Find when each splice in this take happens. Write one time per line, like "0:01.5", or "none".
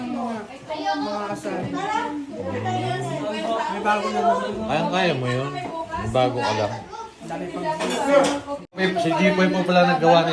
0:08.8